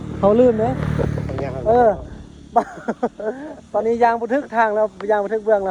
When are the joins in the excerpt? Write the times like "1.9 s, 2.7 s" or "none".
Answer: none